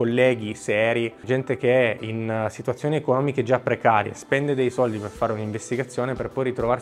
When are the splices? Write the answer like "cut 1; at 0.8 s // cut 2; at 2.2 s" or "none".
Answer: cut 1; at 1.2 s